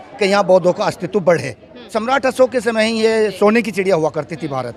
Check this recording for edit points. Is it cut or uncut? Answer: cut